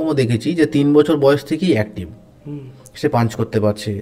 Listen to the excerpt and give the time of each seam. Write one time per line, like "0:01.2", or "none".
none